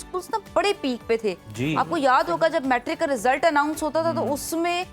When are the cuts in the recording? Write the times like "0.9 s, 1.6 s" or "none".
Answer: none